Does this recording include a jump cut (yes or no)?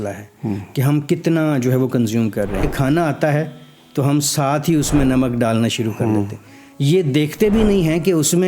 yes